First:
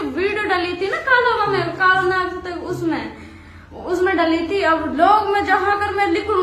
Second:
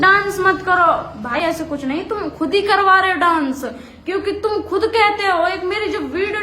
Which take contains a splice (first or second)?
second